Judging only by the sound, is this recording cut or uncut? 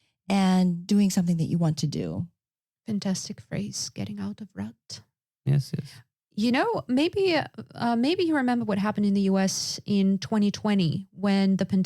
uncut